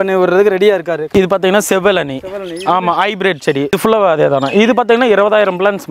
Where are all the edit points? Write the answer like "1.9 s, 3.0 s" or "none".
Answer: 1.0 s, 3.8 s